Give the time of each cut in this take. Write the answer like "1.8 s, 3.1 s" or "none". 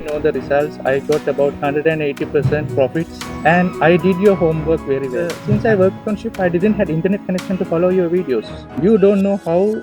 5.4 s